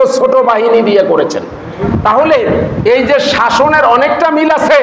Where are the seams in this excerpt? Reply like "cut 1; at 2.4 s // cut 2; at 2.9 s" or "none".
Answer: cut 1; at 1.8 s